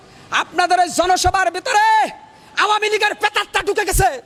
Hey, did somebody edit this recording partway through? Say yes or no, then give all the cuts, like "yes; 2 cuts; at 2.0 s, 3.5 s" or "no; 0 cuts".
no; 0 cuts